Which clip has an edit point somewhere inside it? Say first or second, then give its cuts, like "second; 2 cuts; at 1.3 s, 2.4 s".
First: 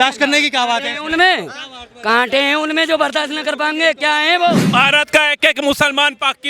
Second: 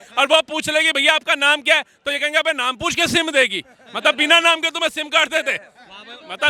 first; 1 cut; at 4.6 s